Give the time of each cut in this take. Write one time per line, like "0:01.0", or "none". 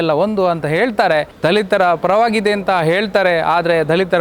0:01.3

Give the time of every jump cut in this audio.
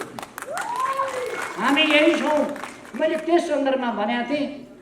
none

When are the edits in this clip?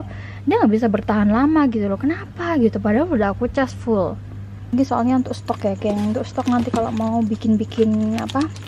0:04.7

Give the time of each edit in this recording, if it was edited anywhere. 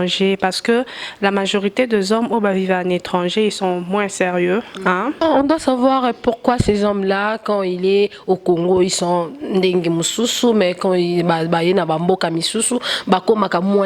0:05.2

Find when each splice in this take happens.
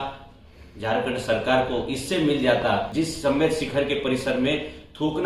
0:02.9

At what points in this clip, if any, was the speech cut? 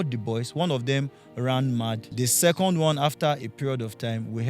0:02.1

